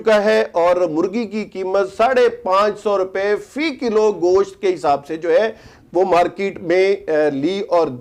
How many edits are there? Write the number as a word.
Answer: zero